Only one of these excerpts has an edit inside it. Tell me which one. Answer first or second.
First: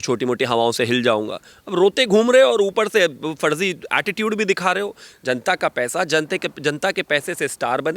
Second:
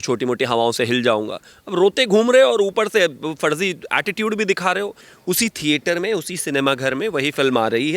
second